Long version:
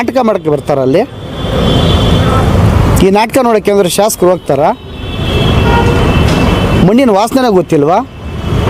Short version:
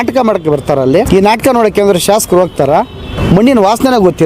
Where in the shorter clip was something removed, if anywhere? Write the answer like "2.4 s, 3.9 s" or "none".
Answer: 1.1 s, 3.2 s